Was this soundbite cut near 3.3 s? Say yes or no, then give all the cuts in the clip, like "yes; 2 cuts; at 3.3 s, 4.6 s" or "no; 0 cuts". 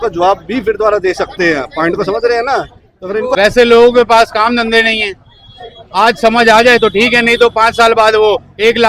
yes; 1 cut; at 3.3 s